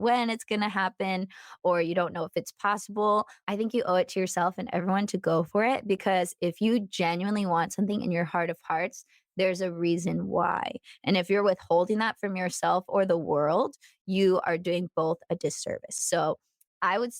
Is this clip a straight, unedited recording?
no; 1 cut; at 3.4 s

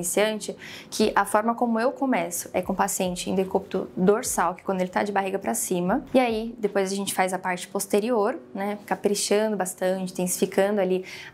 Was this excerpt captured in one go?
no; 1 cut; at 6.0 s

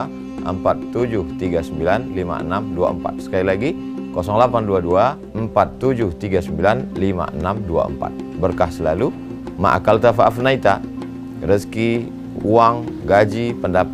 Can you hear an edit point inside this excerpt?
no; 0 cuts

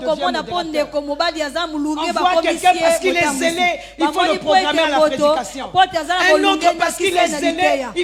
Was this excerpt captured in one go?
yes; 0 cuts

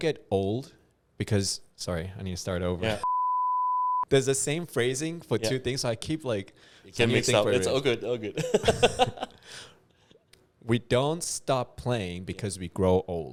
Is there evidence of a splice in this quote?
no; 0 cuts

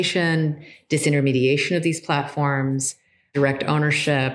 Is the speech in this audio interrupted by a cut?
yes; 1 cut; at 3.3 s

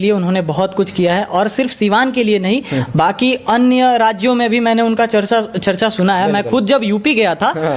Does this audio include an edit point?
no; 0 cuts

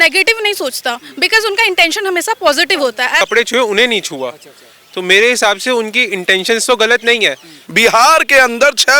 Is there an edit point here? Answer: yes; 2 cuts; at 3.2 s, 7.6 s

